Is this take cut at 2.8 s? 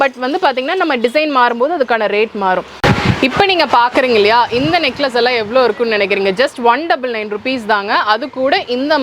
yes; 1 cut; at 2.8 s

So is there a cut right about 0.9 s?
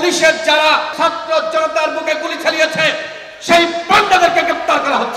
yes; 1 cut; at 0.9 s

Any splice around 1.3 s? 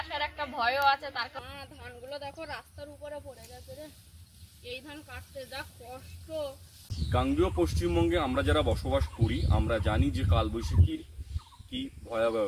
yes; 2 cuts; at 1.3 s, 7.1 s

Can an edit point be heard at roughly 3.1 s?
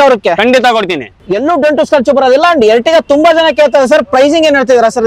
no; 1 cut; at 1.2 s

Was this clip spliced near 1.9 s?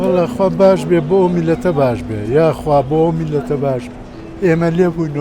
no; 0 cuts

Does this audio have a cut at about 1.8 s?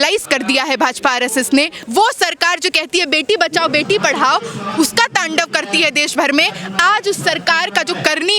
yes; 1 cut; at 1.8 s

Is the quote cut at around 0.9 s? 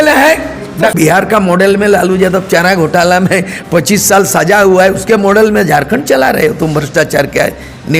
yes; 1 cut; at 0.9 s

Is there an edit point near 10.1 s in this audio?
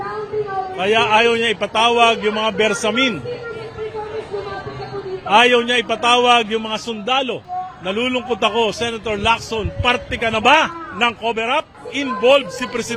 no; 2 cuts; at 7.5 s, 11.8 s

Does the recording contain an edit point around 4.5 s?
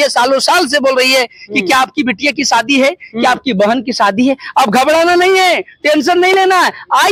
no; 0 cuts

